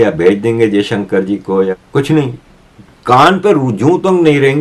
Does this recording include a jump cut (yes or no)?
yes